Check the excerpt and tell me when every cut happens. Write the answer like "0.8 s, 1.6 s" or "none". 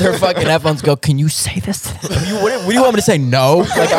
2.3 s